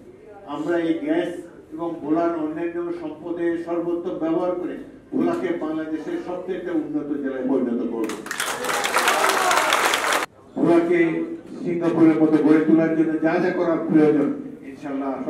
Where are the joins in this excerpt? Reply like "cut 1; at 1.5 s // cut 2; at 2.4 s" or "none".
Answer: cut 1; at 10.3 s